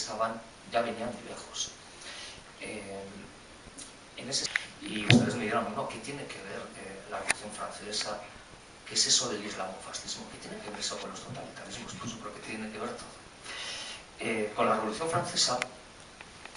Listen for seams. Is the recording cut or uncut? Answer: uncut